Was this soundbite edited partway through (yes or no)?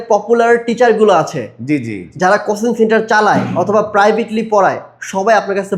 no